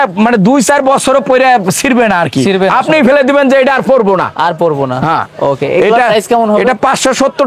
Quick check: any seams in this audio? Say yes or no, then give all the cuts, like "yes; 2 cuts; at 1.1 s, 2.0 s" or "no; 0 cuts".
no; 0 cuts